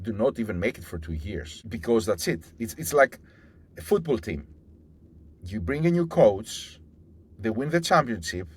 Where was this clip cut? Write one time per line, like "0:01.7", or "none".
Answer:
0:01.6